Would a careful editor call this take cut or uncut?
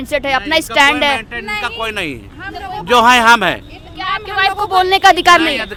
uncut